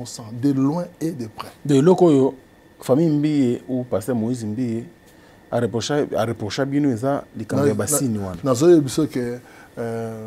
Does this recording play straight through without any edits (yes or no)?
yes